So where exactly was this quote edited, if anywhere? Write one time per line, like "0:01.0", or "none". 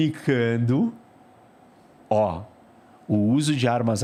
none